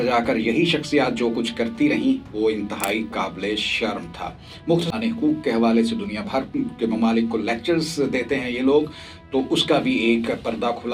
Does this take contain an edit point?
yes; 1 cut; at 4.9 s

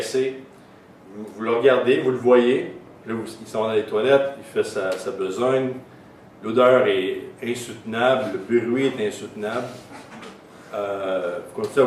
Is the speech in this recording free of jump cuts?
no; 1 cut; at 2.1 s

